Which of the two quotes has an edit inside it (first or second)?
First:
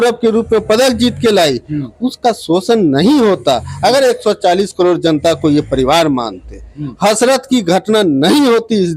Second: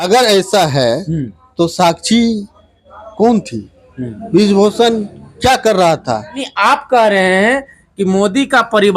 second